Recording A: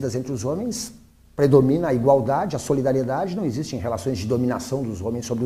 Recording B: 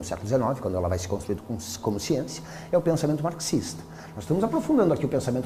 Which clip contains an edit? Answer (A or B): A